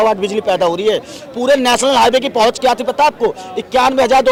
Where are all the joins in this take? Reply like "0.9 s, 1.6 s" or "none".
none